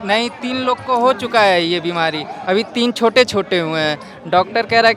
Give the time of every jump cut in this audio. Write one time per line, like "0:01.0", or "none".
none